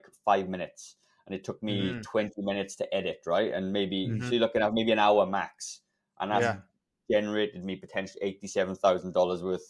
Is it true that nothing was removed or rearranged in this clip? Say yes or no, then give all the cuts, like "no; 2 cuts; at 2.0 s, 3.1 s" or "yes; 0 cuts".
yes; 0 cuts